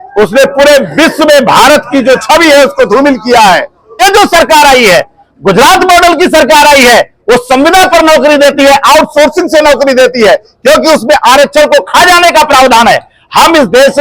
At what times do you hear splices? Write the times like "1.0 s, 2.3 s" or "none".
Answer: 4.0 s